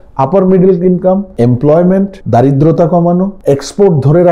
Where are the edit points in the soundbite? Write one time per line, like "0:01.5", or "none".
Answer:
0:01.3
0:02.2
0:03.4